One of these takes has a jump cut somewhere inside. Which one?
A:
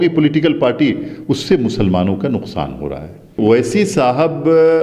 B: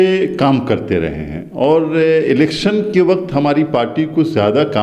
A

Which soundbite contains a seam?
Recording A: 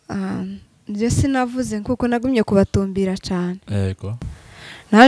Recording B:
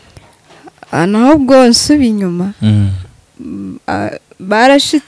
A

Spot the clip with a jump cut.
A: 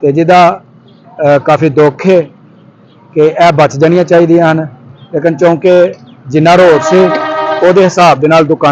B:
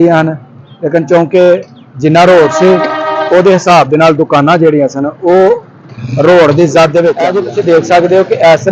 B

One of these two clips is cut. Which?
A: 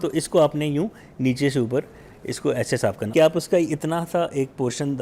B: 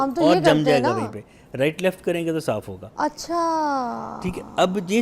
A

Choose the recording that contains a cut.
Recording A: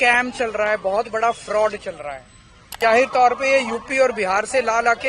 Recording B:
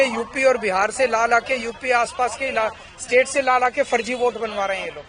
A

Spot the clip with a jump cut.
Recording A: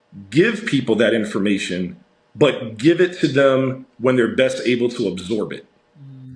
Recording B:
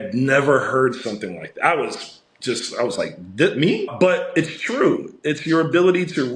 B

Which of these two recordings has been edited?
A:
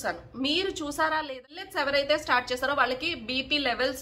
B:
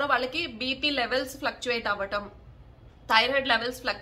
A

